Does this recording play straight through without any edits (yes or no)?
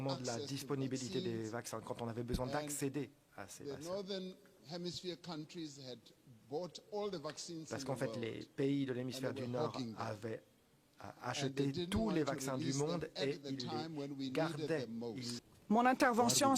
no